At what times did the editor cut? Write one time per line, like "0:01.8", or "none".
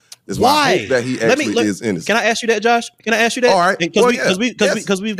0:02.0

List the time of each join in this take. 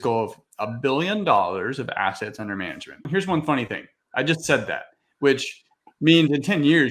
0:03.0

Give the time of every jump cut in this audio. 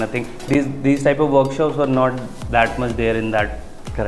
none

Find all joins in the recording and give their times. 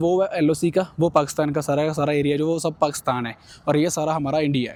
none

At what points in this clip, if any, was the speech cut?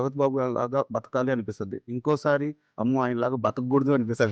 none

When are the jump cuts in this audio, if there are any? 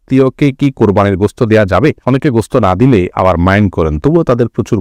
none

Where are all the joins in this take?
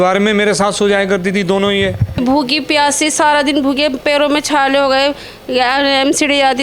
0:02.2

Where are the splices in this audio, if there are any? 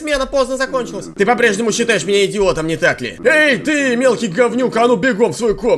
0:01.0
0:03.1

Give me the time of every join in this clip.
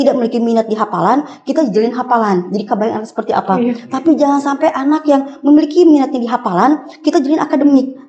none

